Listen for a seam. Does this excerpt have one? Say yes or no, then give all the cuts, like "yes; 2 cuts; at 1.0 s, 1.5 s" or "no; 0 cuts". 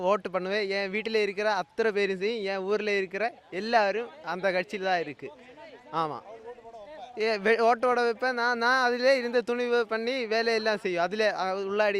no; 0 cuts